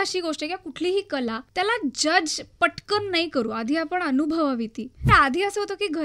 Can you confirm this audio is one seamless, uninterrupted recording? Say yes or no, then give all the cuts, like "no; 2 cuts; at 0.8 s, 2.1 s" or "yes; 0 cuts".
no; 2 cuts; at 1.4 s, 5.0 s